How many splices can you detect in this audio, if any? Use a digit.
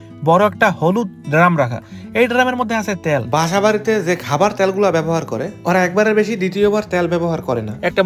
0